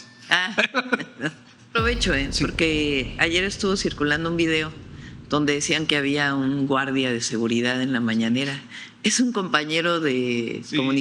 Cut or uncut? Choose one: cut